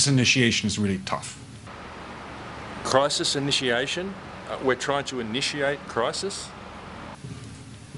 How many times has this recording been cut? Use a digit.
0